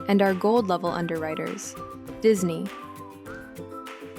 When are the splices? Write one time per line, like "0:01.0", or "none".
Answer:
0:02.7